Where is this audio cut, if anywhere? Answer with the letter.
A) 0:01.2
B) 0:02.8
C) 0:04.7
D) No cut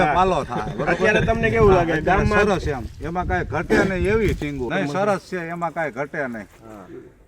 C